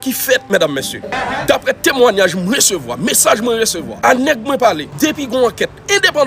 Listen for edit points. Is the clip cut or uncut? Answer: uncut